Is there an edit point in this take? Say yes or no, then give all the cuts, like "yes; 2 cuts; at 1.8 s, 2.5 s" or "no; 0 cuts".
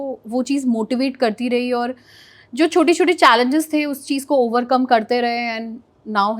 no; 0 cuts